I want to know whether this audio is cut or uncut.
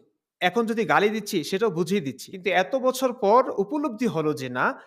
cut